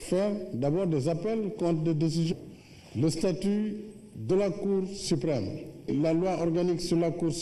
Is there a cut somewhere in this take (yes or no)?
no